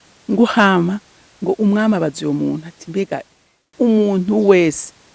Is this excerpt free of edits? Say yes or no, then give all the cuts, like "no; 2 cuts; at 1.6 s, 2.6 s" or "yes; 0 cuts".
no; 1 cut; at 3.7 s